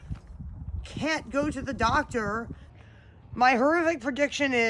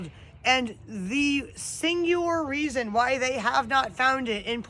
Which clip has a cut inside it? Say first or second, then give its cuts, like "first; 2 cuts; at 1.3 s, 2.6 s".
first; 1 cut; at 2.6 s